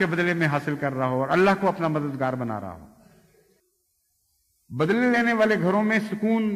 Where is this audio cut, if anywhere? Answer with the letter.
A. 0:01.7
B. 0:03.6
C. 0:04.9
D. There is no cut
B